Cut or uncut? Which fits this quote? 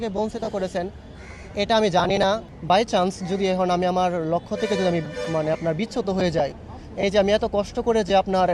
cut